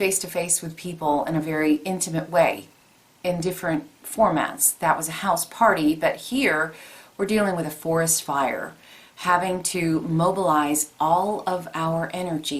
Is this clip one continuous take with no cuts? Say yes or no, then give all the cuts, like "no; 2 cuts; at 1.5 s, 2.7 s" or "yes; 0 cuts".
yes; 0 cuts